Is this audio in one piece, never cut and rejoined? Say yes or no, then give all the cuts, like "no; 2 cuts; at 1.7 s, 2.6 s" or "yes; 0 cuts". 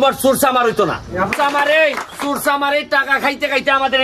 no; 1 cut; at 1.3 s